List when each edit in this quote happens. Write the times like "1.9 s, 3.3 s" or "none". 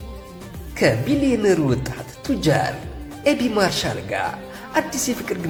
none